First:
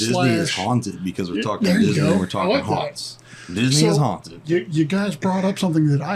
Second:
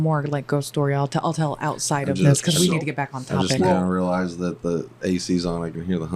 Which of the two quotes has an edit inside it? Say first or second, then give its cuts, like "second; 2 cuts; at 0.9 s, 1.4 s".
first; 1 cut; at 4.4 s